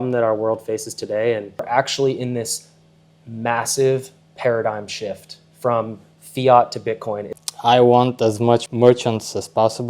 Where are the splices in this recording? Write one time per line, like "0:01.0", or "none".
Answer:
0:01.6
0:07.3
0:08.7